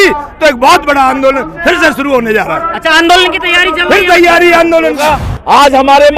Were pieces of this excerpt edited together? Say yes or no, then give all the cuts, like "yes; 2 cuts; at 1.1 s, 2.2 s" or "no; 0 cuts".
yes; 1 cut; at 5.0 s